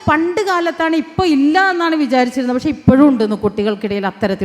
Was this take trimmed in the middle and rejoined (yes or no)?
no